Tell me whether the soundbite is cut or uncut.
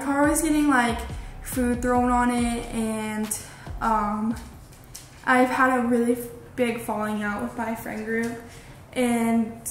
uncut